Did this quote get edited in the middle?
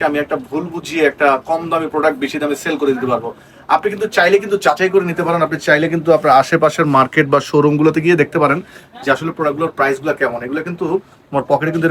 no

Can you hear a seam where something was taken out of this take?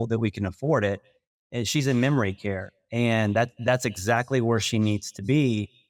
no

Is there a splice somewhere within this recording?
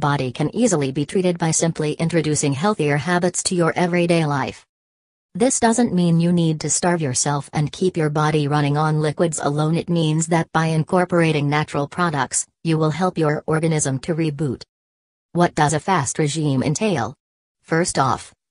no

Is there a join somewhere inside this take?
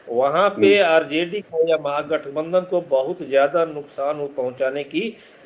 no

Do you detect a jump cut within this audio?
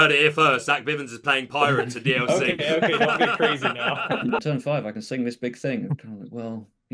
yes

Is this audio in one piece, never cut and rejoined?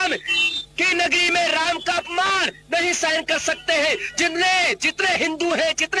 yes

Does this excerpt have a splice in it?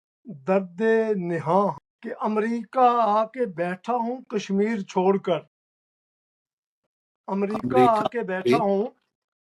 yes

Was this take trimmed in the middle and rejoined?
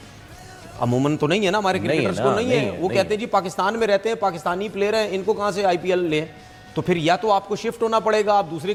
no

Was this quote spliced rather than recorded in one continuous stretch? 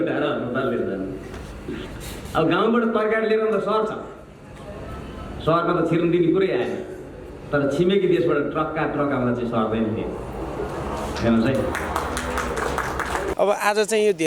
yes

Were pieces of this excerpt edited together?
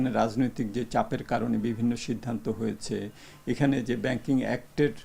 no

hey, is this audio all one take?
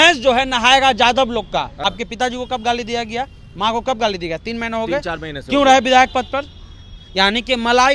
no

